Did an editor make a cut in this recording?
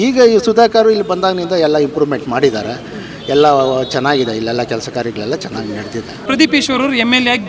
yes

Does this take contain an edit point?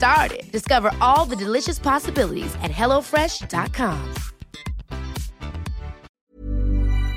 yes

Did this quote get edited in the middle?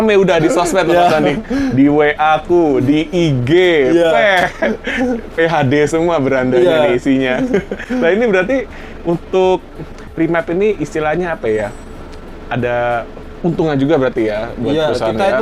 no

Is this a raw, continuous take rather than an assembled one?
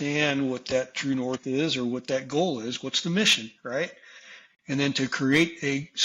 yes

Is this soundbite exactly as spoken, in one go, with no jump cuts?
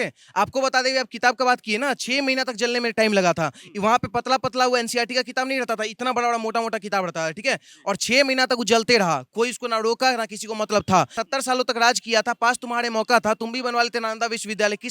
no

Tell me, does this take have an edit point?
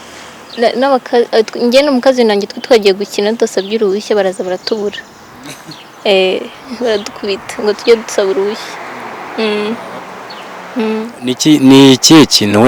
no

